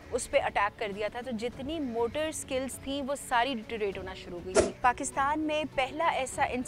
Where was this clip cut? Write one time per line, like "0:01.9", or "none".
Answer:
0:04.8